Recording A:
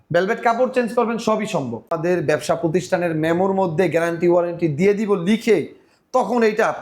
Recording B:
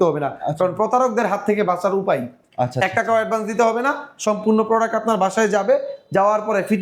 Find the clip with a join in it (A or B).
A